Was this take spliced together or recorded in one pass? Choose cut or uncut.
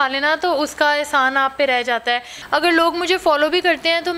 cut